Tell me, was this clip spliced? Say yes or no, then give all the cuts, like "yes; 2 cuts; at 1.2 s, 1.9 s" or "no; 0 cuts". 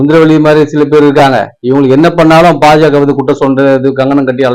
no; 0 cuts